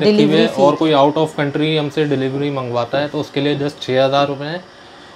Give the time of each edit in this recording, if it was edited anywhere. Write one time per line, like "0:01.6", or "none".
none